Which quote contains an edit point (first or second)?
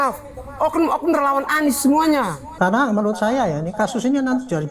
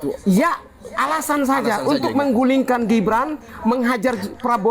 first